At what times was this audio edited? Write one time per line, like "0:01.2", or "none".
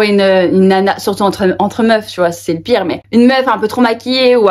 none